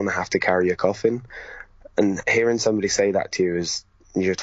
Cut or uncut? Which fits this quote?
uncut